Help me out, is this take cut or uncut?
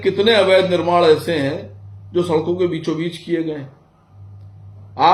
uncut